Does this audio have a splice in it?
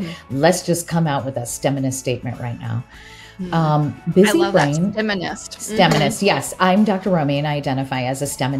no; 0 cuts

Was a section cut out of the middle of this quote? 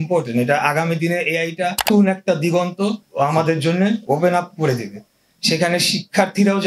yes; 2 cuts; at 1.8 s, 3.0 s

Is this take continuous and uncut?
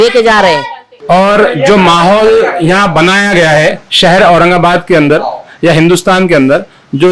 no; 1 cut; at 1.0 s

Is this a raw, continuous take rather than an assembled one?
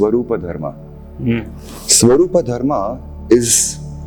yes; 0 cuts

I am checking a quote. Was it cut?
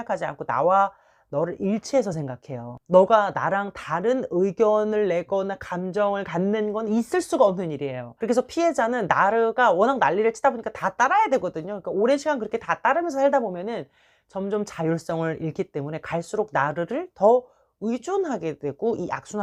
no; 0 cuts

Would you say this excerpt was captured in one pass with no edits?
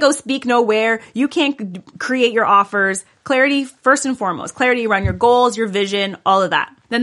yes; 0 cuts

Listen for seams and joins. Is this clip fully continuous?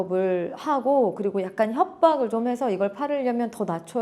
yes; 0 cuts

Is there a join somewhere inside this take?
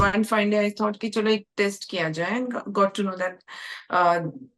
no; 0 cuts

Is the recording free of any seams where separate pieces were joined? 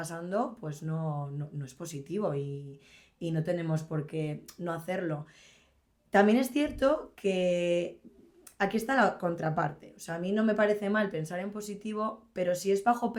yes; 0 cuts

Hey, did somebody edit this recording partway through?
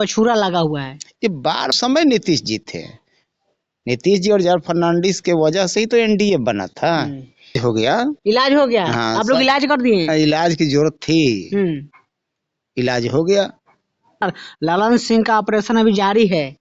yes; 3 cuts; at 1.7 s, 7.6 s, 14.2 s

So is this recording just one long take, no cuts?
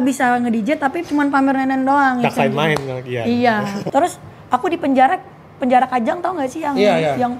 no; 1 cut; at 3.8 s

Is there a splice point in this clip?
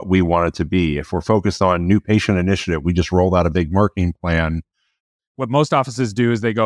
yes; 1 cut; at 5.2 s

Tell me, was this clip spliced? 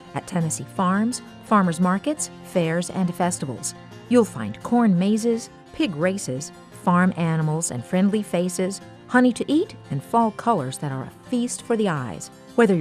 no; 0 cuts

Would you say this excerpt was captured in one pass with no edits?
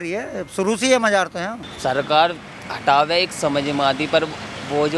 no; 1 cut; at 1.6 s

